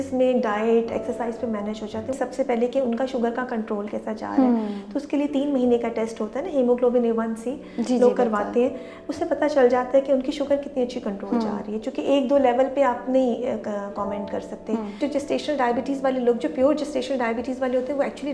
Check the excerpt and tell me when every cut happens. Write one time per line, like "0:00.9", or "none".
0:02.2
0:15.0